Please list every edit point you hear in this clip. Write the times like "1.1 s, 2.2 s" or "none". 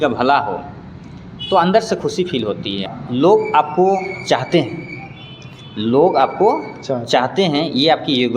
2.9 s